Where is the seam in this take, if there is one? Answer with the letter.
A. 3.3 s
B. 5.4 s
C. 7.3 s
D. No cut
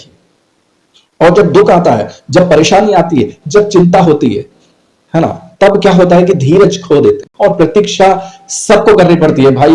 C